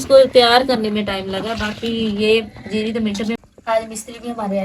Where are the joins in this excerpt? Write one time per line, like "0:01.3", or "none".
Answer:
0:03.4

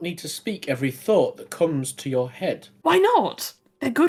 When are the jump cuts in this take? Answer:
none

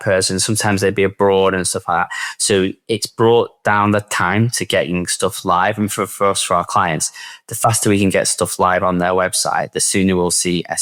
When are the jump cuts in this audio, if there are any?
none

